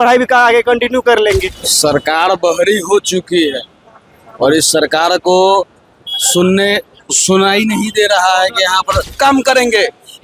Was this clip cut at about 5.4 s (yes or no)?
no